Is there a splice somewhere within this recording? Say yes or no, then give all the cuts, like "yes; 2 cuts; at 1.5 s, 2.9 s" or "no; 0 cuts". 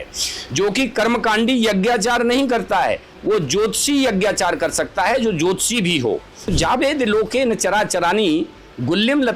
yes; 1 cut; at 6.5 s